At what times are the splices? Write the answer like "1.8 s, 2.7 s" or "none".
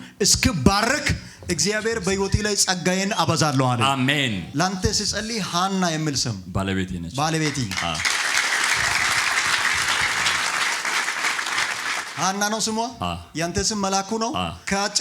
none